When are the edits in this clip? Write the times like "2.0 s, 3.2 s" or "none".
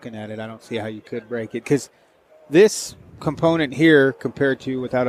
none